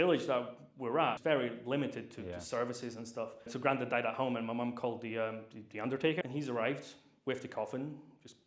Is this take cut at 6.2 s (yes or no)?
yes